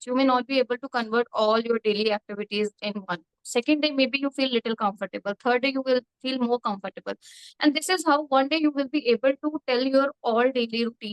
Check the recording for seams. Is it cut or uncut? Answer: uncut